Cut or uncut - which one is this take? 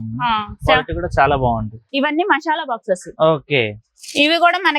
cut